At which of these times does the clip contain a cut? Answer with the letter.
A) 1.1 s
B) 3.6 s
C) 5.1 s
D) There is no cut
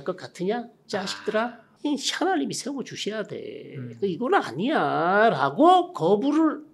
D